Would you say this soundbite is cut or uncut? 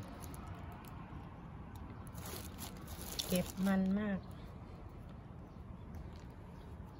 uncut